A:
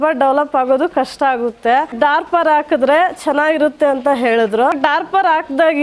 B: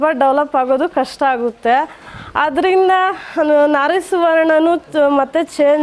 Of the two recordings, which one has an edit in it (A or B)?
A